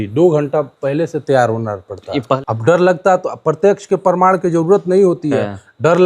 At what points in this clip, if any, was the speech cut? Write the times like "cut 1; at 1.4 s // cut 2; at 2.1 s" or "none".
cut 1; at 2.4 s